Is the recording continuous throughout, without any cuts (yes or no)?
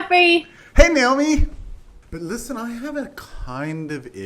no